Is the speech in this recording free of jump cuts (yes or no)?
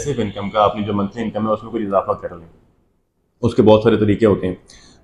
yes